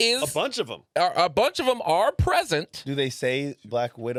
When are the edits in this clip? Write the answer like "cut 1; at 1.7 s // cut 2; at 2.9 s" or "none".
none